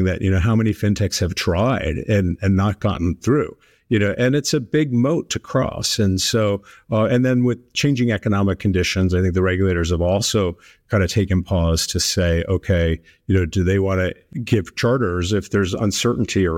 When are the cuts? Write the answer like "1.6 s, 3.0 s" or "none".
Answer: 14.2 s

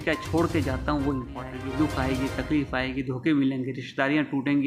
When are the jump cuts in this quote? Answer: 1.6 s

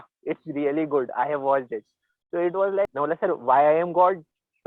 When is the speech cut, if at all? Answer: 2.9 s

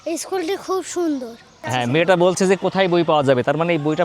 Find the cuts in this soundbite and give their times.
1.6 s

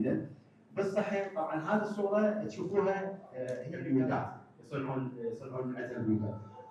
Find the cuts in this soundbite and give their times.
3.6 s

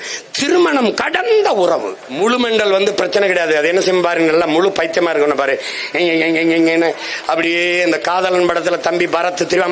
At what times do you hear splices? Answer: 2.2 s

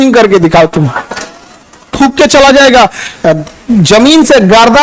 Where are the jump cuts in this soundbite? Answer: 1.9 s

